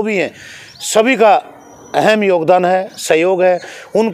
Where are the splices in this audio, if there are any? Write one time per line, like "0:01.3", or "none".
none